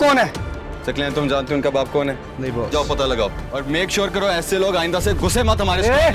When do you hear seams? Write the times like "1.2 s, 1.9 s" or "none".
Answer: 2.3 s, 3.5 s